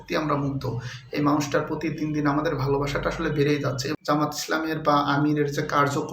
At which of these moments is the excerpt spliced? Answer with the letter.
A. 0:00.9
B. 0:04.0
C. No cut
B